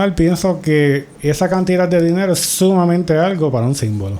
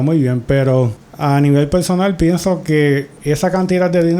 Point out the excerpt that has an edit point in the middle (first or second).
second